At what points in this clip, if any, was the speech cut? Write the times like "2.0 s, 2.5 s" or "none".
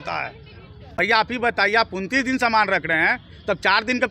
0.9 s

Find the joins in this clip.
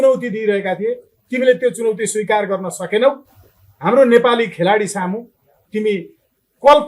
none

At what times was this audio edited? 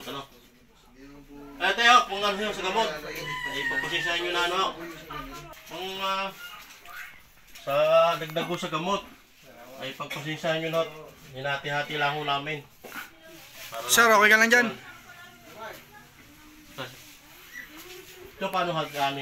5.5 s

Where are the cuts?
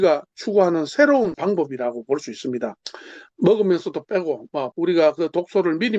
1.4 s, 4.7 s

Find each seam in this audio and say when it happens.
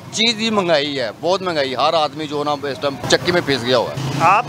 3.0 s

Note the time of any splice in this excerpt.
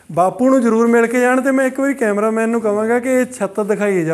none

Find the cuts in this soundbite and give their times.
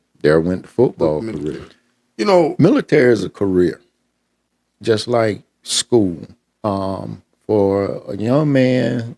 2.5 s

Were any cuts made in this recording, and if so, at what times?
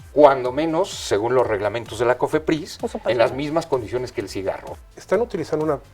4.7 s

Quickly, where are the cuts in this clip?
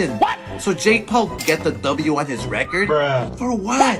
1.4 s

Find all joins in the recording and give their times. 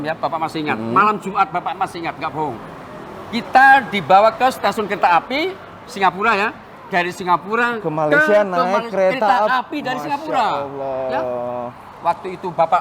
none

